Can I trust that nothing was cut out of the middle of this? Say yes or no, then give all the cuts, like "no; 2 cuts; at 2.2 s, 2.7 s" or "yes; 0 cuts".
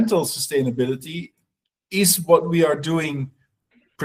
yes; 0 cuts